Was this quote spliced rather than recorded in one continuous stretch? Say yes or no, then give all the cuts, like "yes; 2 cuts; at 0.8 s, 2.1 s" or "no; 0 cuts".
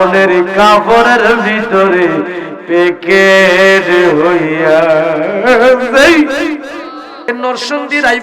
yes; 1 cut; at 7.3 s